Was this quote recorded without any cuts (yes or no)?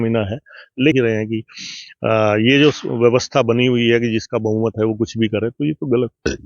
no